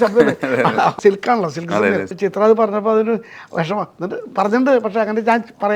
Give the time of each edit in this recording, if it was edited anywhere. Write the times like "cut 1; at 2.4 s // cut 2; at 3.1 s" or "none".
cut 1; at 1.0 s // cut 2; at 2.1 s